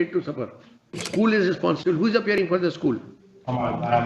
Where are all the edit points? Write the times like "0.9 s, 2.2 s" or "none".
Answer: 1.0 s